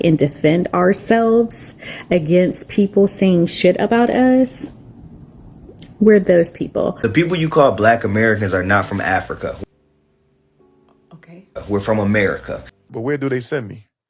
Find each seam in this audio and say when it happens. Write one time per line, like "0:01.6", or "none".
0:07.0
0:12.9